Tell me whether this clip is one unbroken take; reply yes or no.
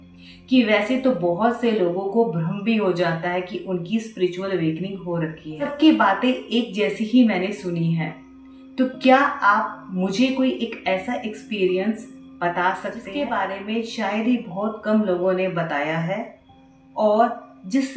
no